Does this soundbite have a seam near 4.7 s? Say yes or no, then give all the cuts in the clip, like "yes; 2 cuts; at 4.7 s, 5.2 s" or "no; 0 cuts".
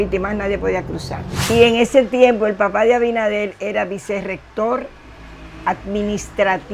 no; 1 cut; at 1.5 s